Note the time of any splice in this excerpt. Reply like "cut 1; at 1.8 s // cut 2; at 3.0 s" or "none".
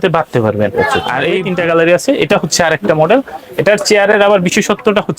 cut 1; at 1.4 s

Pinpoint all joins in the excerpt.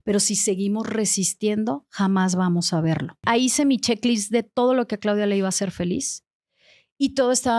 cut 1; at 3.1 s

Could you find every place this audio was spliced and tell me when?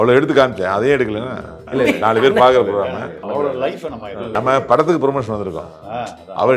cut 1; at 1.7 s // cut 2; at 3.2 s // cut 3; at 4.3 s

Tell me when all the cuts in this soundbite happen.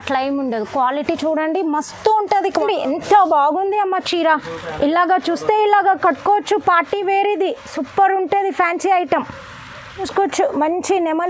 cut 1; at 2.6 s // cut 2; at 10.0 s

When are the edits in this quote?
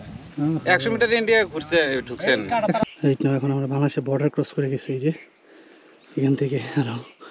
cut 1; at 2.8 s

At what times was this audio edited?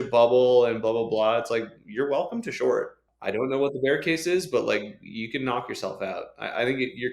cut 1; at 3.0 s

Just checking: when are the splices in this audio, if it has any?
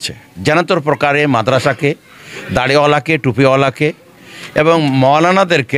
none

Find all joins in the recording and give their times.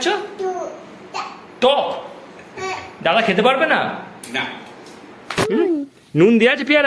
cut 1; at 5.4 s

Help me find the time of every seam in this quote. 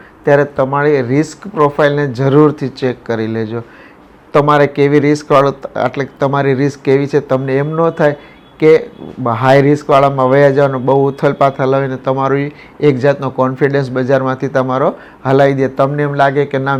none

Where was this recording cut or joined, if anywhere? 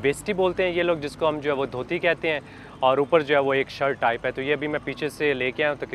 none

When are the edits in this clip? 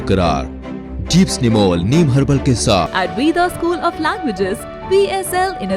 cut 1; at 2.9 s

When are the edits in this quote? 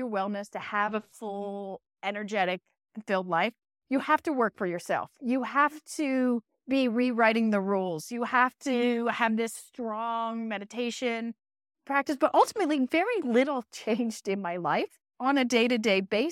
cut 1; at 11.8 s

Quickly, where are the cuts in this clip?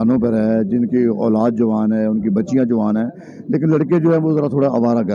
none

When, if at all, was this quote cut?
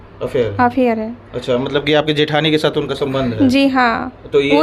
none

